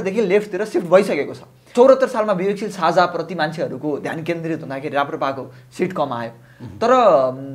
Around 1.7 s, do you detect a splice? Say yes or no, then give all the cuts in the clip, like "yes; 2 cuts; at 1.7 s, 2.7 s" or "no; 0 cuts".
yes; 1 cut; at 1.7 s